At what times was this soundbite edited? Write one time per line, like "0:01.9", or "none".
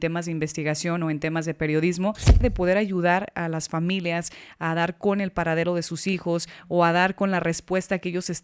0:02.4